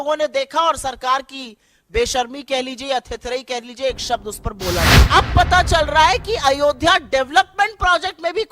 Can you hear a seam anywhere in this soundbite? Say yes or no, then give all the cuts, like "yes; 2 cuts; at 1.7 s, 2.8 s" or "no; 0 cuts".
yes; 1 cut; at 5.0 s